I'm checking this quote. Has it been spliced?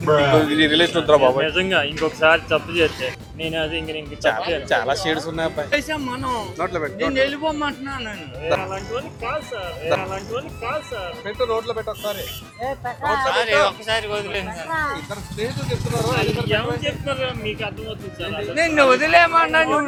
no; 0 cuts

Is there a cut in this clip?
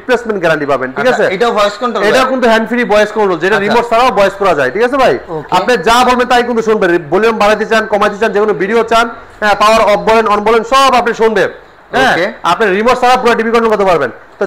no; 0 cuts

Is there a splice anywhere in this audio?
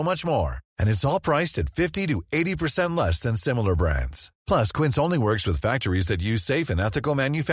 no; 0 cuts

